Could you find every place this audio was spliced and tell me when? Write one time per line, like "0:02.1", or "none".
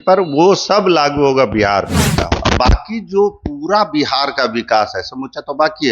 0:02.1